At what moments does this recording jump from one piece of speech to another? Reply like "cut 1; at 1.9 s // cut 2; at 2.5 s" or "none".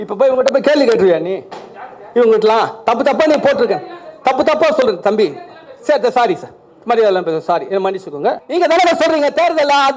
cut 1; at 8.4 s